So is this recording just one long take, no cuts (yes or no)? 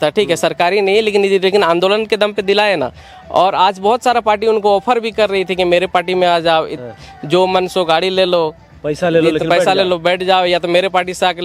yes